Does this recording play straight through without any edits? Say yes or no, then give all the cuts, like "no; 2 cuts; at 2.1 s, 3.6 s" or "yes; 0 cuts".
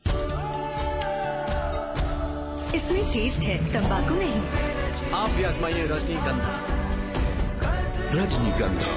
yes; 0 cuts